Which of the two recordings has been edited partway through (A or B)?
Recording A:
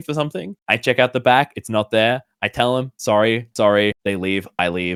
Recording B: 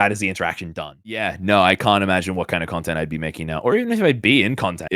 B